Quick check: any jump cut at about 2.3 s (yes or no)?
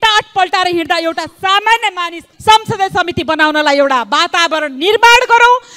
yes